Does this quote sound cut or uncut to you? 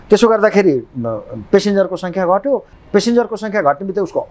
cut